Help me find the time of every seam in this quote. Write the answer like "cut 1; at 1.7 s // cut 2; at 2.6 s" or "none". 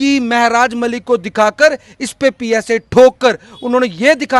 none